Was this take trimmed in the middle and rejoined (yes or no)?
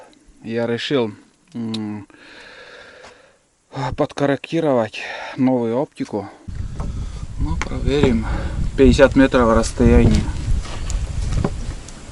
yes